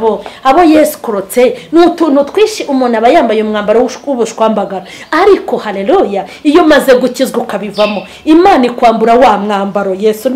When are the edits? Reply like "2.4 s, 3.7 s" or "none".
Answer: none

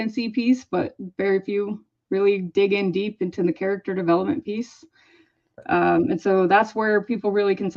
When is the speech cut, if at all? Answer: none

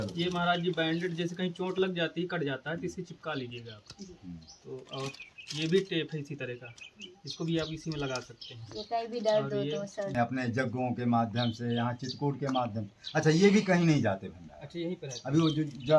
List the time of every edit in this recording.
10.1 s

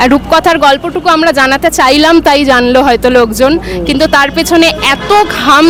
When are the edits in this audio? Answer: none

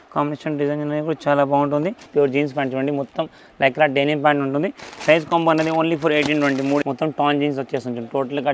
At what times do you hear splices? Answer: 2.0 s, 6.8 s

